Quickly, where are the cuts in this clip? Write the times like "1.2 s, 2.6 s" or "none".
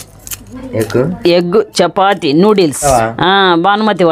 2.8 s